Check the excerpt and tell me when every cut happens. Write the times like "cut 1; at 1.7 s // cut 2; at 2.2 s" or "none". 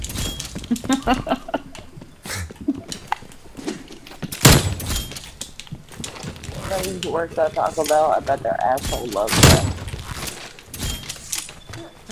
cut 1; at 3.6 s